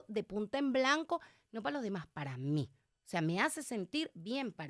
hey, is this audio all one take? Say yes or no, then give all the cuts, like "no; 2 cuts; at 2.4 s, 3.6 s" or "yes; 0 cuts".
yes; 0 cuts